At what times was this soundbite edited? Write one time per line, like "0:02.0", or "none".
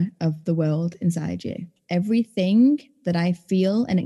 0:01.8

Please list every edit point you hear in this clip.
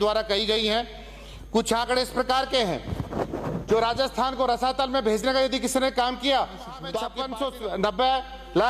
0:07.1

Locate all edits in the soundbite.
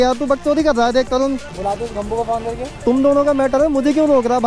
0:01.5
0:02.8

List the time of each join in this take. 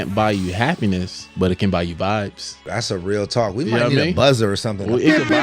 0:01.2
0:02.5

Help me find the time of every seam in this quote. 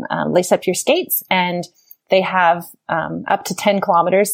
none

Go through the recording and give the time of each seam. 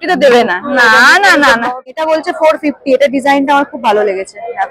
0:02.0

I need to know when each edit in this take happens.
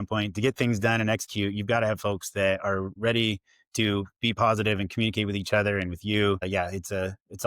0:02.9
0:06.4

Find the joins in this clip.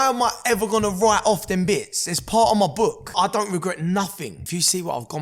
0:03.1
0:04.4

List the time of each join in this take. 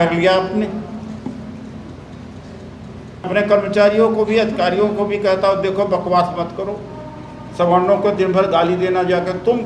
0:03.2

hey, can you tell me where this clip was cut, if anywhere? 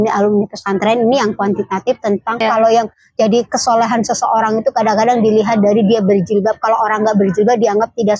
0:02.4

